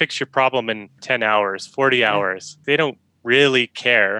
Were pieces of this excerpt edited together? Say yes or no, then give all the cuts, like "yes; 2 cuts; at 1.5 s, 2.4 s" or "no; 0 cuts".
yes; 2 cuts; at 1.0 s, 2.6 s